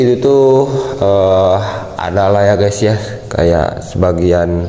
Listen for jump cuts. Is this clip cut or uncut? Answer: uncut